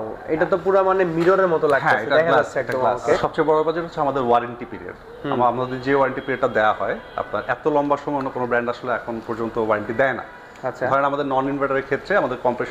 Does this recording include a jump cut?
yes; 1 cut; at 3.2 s

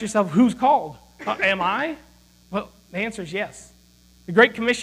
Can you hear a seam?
no; 0 cuts

